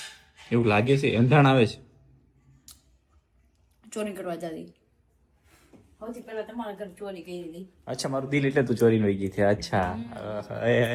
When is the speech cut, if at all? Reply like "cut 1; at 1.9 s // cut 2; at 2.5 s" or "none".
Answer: none